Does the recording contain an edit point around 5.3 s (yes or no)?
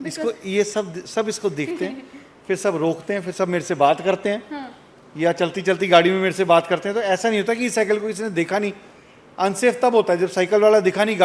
no